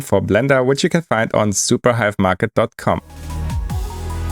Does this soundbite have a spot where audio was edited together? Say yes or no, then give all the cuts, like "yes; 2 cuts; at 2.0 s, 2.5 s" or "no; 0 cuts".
yes; 1 cut; at 3.1 s